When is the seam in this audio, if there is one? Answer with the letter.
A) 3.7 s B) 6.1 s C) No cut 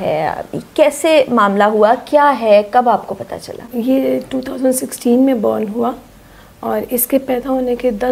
A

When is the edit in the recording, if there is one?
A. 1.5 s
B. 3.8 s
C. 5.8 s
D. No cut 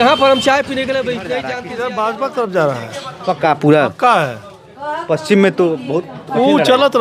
A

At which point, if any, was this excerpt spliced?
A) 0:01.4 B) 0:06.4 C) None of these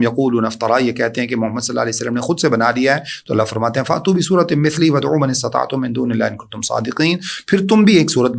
C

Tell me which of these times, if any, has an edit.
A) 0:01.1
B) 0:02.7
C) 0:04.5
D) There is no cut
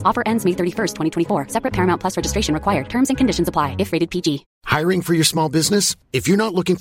C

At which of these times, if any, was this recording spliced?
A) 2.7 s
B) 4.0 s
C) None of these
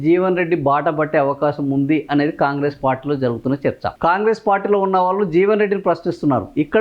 B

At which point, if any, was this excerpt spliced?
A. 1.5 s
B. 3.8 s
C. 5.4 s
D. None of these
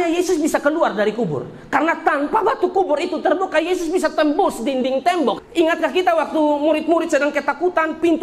C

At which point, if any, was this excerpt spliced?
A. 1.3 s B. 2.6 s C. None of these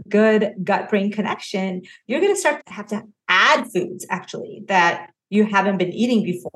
B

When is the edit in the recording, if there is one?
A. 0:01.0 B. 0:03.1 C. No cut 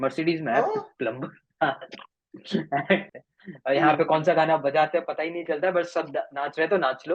B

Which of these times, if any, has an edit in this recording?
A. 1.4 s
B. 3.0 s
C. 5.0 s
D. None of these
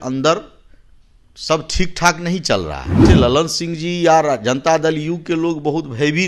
B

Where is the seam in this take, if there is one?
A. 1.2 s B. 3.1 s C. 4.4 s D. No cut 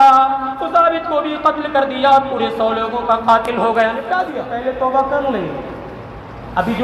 C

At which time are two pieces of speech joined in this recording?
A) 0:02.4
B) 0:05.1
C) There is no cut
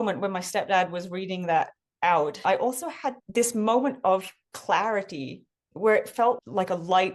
A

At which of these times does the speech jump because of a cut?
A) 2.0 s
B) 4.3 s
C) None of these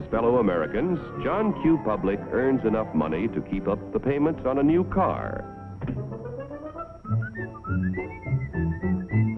B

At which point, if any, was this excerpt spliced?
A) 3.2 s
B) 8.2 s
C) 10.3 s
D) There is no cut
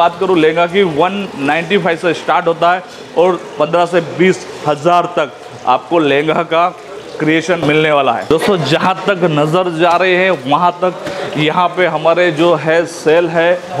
D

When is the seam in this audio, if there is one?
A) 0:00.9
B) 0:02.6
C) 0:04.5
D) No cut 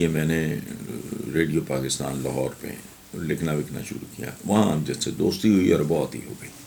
D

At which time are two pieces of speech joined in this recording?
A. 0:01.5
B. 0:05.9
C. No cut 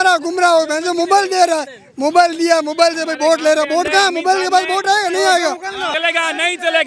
B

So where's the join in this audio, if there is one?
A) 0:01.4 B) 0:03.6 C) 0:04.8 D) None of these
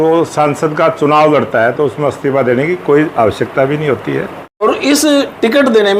C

